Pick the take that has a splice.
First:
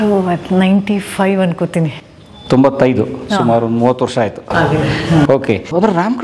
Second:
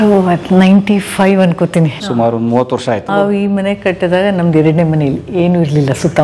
second; 2 cuts; at 2.0 s, 3.1 s

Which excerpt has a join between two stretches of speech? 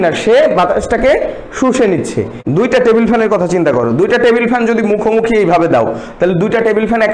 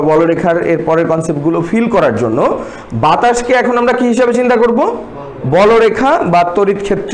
first; 1 cut; at 2.4 s

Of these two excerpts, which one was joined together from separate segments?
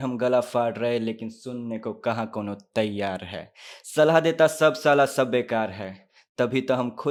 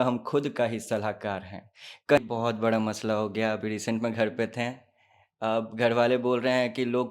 second; 1 cut; at 2.2 s

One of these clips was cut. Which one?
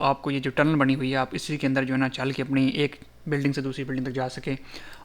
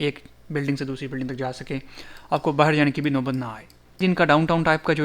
second; 1 cut; at 4.0 s

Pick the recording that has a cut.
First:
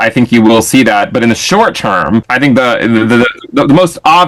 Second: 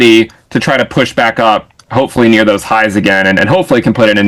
first; 1 cut; at 2.3 s

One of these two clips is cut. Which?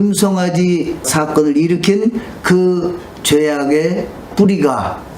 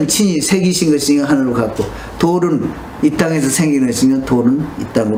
first; 2 cuts; at 1.0 s, 4.2 s

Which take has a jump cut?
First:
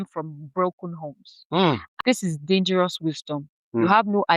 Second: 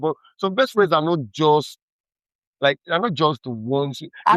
first; 1 cut; at 1.9 s

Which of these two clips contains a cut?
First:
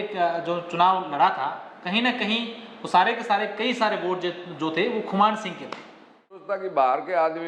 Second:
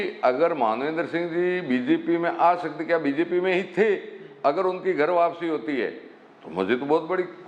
first; 1 cut; at 6.5 s

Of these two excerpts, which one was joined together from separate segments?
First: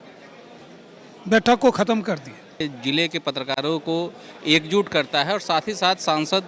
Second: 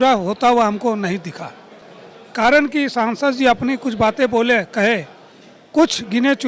first; 1 cut; at 2.7 s

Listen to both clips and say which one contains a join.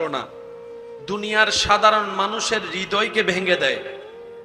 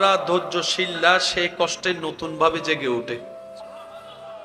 second; 1 cut; at 3.2 s

